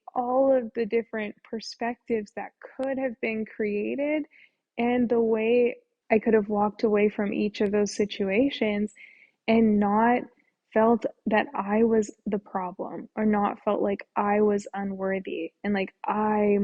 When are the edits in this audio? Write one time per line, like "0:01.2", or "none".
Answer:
0:05.9